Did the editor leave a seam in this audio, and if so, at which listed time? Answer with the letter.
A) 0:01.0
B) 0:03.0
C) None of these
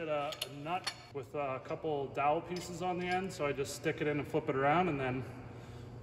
A